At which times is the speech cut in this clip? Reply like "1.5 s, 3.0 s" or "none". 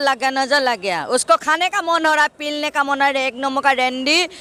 none